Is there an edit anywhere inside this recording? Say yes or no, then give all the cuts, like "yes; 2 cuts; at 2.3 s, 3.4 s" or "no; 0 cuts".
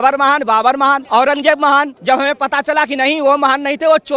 yes; 2 cuts; at 1.0 s, 1.9 s